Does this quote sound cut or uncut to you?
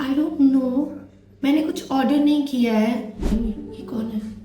cut